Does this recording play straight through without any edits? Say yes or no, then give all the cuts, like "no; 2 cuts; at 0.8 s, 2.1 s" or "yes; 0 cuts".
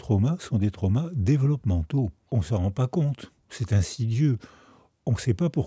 no; 1 cut; at 2.2 s